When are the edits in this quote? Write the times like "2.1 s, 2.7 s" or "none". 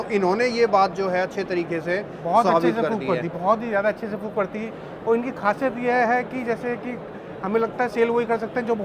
none